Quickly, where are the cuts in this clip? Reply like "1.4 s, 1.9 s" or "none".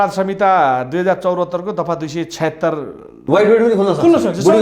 3.2 s

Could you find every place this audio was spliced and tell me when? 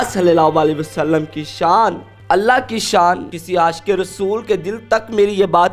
2.1 s, 3.4 s

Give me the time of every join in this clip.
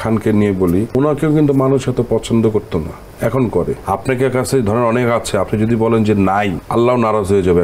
0.9 s, 3.8 s, 6.6 s

